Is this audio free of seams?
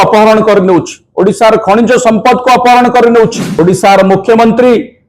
no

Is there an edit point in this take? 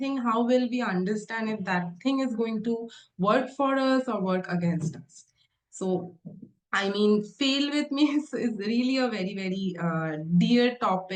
no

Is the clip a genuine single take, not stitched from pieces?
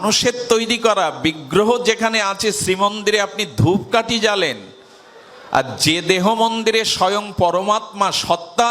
yes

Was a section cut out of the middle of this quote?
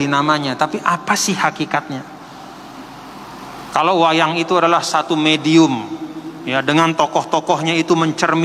no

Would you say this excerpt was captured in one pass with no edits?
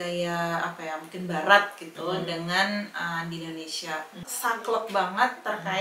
no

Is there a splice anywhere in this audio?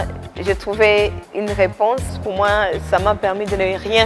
yes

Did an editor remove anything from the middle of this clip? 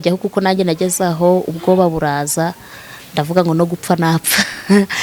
no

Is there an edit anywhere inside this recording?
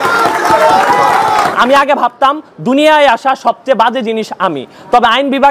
yes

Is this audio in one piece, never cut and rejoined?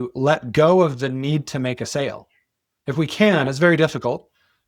no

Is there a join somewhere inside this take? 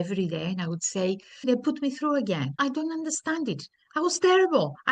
yes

